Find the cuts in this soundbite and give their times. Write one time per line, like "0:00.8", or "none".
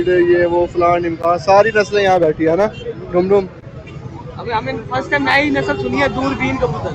none